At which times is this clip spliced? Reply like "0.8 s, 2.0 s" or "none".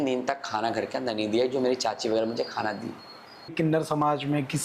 3.5 s